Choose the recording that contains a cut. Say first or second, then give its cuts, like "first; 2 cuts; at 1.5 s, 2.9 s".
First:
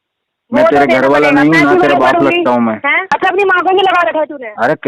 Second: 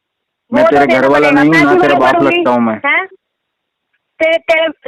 first; 1 cut; at 3.1 s